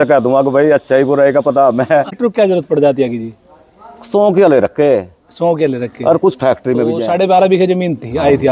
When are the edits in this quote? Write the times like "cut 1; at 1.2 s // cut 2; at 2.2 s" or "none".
cut 1; at 2.1 s // cut 2; at 7.0 s